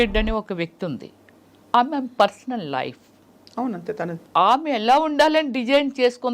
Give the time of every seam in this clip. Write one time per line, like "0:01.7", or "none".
0:04.2